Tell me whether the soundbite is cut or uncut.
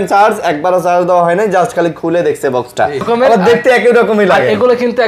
cut